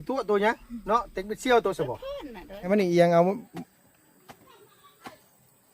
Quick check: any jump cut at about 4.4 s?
no; 1 cut; at 2.7 s

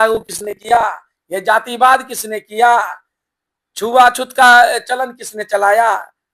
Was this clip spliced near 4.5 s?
no; 0 cuts

